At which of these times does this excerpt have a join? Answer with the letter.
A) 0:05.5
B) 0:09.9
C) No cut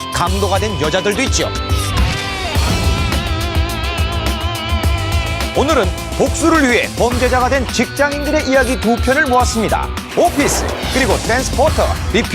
B